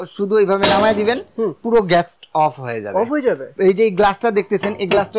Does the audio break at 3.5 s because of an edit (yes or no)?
yes